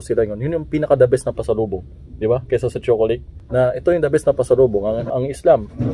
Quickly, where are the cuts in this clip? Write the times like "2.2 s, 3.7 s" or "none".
3.4 s, 5.0 s